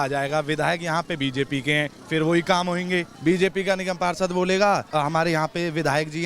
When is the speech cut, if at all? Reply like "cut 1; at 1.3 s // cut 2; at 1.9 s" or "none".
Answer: cut 1; at 3.1 s // cut 2; at 4.9 s